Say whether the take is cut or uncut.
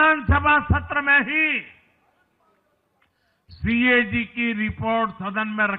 uncut